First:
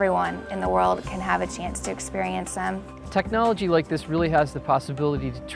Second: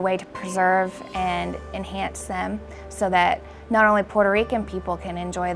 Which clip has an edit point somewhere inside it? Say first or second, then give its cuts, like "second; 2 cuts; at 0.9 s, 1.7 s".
first; 1 cut; at 3.0 s